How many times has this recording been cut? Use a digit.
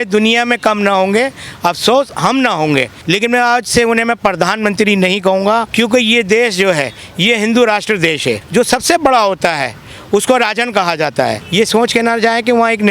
4